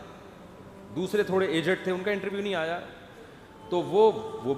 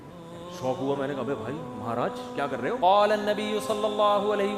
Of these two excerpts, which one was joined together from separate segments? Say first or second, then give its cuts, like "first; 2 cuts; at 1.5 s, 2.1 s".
second; 1 cut; at 2.8 s